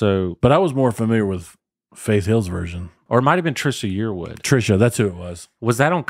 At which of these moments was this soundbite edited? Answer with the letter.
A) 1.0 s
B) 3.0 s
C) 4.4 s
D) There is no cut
B